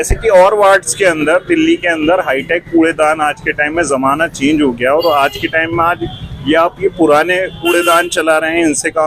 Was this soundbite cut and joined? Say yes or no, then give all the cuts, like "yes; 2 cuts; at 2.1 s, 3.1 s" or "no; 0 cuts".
no; 0 cuts